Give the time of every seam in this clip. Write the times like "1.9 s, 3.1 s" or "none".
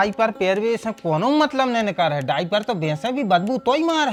none

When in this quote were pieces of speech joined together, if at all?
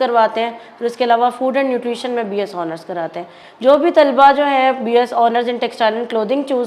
none

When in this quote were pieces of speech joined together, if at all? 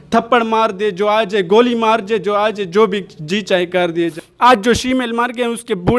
4.1 s

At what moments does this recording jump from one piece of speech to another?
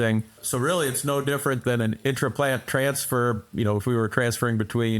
2.0 s

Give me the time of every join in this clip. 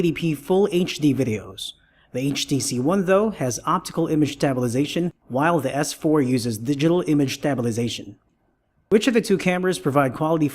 2.7 s

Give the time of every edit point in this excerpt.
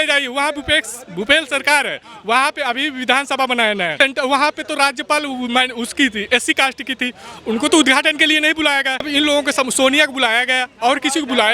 3.9 s, 9.1 s

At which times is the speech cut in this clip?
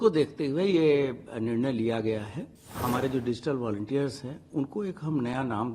2.7 s

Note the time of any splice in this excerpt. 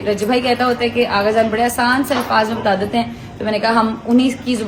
none

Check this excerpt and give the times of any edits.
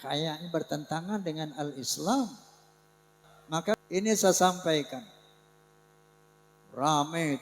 3.7 s

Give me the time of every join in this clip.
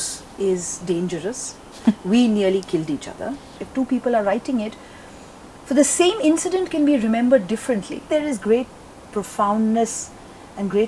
3.6 s, 8.0 s

